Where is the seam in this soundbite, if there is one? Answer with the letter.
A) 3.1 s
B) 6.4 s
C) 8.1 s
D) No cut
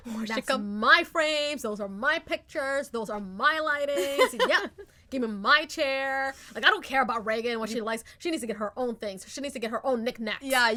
D